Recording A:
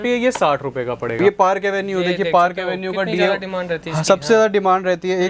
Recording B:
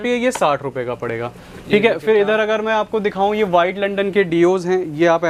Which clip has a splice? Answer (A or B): A